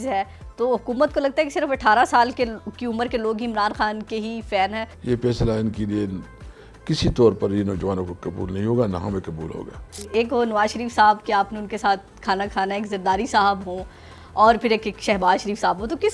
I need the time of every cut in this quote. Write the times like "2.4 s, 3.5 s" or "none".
4.9 s, 10.0 s